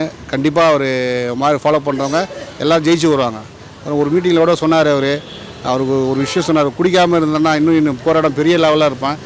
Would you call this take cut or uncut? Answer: uncut